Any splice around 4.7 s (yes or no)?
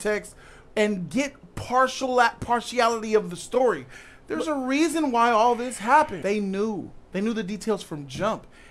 no